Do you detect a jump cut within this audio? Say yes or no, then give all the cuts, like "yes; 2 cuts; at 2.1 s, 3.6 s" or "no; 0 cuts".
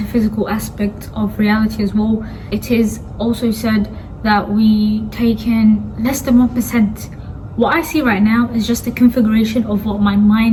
no; 0 cuts